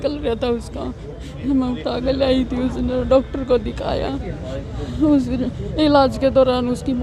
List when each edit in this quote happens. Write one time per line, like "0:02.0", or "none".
none